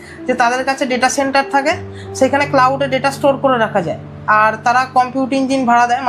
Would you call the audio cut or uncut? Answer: uncut